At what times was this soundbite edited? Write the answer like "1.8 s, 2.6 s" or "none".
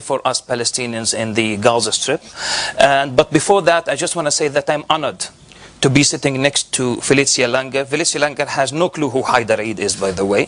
none